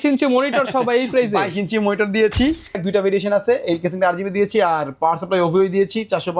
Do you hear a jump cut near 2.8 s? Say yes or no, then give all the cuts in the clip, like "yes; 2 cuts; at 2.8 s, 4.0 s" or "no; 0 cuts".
yes; 1 cut; at 2.8 s